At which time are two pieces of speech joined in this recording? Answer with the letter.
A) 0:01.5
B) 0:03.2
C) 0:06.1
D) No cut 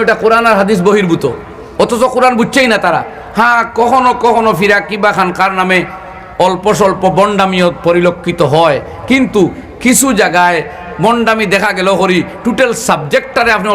B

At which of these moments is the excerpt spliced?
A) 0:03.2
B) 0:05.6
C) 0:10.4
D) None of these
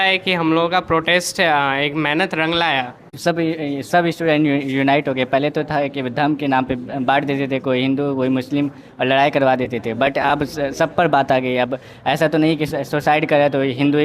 A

